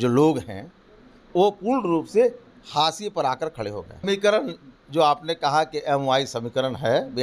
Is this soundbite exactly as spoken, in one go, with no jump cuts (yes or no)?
no